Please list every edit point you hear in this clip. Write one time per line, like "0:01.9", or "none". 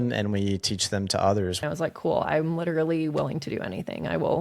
0:01.6